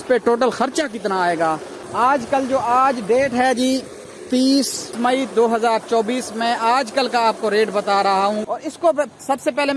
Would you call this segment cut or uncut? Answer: cut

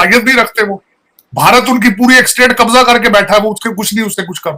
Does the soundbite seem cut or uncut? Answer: uncut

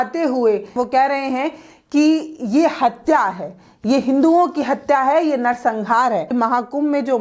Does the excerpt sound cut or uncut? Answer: cut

